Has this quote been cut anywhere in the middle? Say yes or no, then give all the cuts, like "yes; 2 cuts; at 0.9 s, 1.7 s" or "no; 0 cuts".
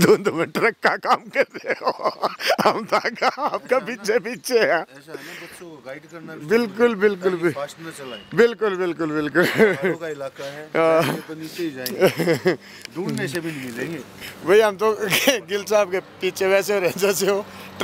no; 0 cuts